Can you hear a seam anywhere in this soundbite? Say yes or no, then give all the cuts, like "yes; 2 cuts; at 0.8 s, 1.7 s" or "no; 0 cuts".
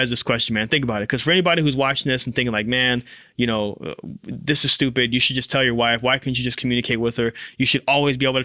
no; 0 cuts